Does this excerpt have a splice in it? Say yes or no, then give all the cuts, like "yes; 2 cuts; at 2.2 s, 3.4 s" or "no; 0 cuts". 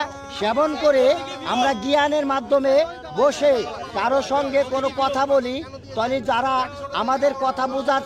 no; 0 cuts